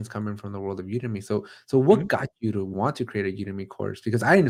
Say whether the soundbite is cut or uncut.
uncut